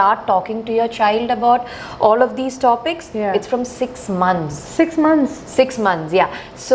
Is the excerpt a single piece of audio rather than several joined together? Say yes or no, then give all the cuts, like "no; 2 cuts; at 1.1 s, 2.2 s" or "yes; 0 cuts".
yes; 0 cuts